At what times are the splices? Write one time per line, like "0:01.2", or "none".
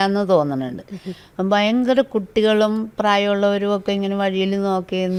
none